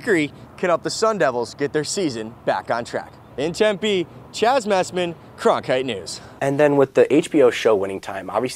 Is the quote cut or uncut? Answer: uncut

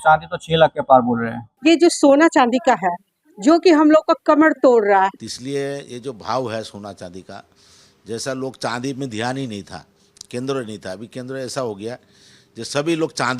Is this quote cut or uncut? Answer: cut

